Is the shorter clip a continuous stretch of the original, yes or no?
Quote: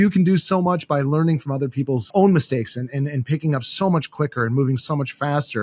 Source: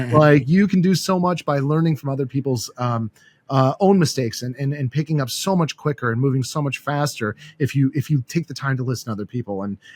no